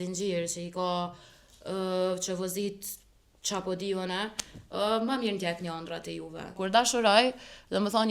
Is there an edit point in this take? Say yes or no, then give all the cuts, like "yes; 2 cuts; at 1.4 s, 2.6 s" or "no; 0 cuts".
yes; 1 cut; at 6.5 s